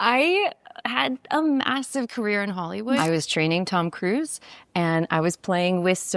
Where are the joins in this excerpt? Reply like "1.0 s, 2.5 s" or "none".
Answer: 3.0 s